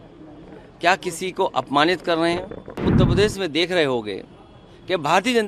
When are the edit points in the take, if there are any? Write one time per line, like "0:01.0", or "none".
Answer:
0:02.9